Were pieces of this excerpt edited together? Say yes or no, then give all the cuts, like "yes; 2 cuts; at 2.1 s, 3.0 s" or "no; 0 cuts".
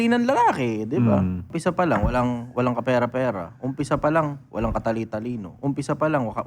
yes; 1 cut; at 1.5 s